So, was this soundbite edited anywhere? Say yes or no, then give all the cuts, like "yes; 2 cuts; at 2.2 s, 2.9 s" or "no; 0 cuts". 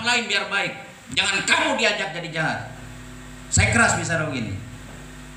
no; 0 cuts